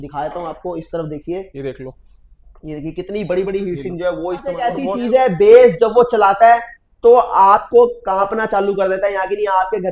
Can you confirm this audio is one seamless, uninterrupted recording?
no; 1 cut; at 4.8 s

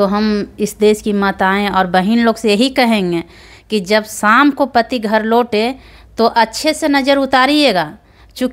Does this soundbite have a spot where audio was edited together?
no; 0 cuts

